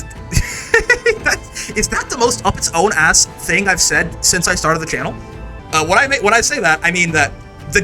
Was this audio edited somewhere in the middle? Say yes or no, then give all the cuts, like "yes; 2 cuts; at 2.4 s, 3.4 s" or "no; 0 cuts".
yes; 1 cut; at 5.5 s